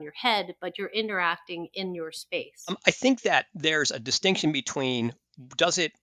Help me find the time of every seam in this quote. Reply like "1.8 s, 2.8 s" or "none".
none